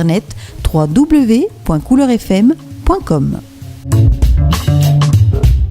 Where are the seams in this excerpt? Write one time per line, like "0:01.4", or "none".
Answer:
0:03.8